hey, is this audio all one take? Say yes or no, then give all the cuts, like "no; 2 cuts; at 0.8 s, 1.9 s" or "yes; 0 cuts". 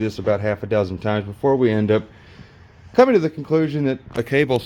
yes; 0 cuts